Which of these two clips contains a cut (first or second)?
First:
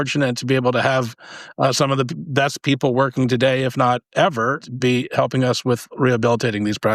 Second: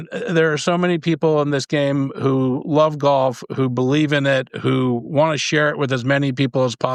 first